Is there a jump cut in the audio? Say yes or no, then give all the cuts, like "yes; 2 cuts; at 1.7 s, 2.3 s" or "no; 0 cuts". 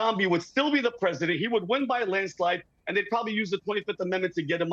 no; 0 cuts